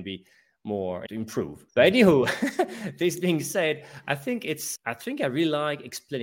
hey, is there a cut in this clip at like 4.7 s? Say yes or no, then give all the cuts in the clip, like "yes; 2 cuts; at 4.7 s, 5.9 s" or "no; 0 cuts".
yes; 2 cuts; at 1.5 s, 4.7 s